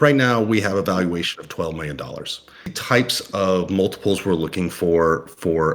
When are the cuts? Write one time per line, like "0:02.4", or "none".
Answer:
0:02.8